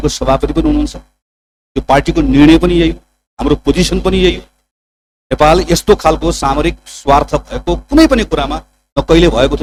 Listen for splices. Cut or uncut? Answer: uncut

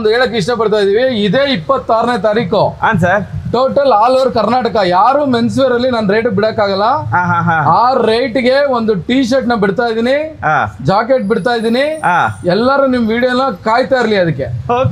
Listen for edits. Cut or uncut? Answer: uncut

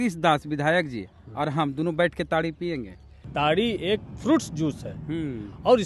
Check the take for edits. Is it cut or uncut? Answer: cut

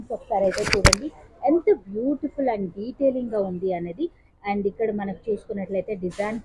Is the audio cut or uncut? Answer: uncut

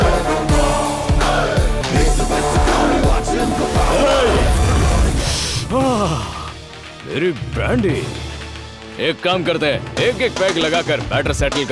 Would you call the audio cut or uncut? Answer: cut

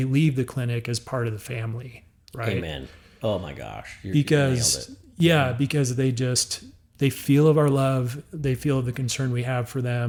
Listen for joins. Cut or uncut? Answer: uncut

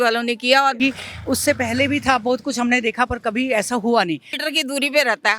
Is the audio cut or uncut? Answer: cut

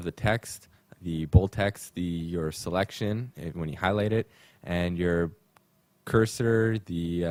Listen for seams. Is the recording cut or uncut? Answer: uncut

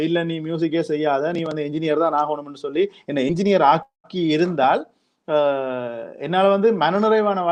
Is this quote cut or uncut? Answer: uncut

